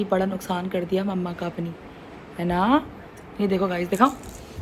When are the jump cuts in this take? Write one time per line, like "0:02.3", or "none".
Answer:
none